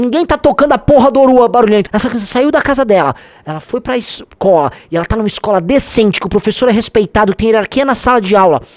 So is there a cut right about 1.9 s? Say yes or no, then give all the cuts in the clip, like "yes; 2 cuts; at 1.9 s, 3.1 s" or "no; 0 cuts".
yes; 1 cut; at 1.9 s